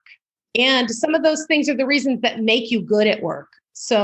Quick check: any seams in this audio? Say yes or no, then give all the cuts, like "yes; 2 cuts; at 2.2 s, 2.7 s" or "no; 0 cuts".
no; 0 cuts